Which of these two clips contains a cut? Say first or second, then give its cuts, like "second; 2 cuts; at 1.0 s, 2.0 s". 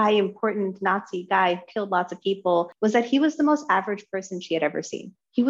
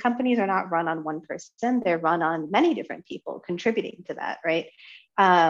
first; 1 cut; at 2.7 s